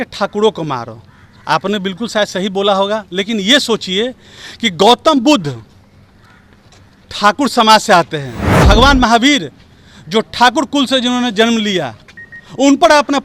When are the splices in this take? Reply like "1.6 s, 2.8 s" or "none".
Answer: 8.6 s

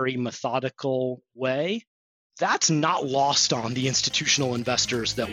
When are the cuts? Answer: none

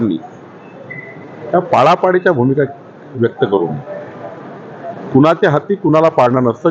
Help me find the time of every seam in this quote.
none

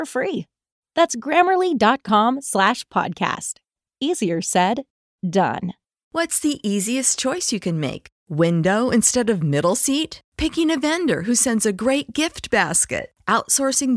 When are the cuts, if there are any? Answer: 6.1 s

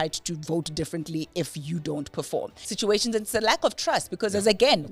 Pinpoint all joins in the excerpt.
2.6 s

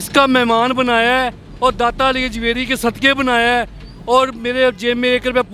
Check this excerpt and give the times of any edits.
none

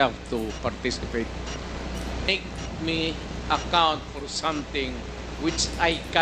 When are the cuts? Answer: 2.3 s

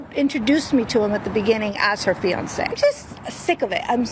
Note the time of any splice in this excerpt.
2.7 s

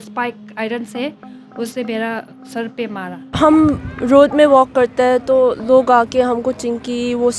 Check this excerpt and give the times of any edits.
3.2 s

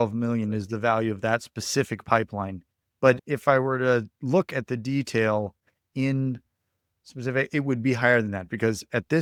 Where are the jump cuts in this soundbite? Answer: none

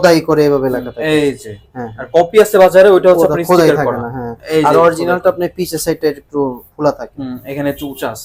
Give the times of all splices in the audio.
none

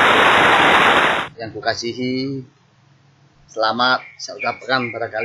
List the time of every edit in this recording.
1.2 s

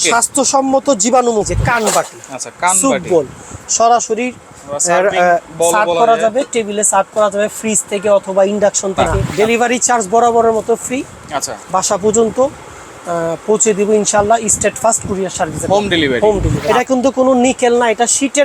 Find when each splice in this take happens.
1.5 s, 9.2 s, 16.5 s

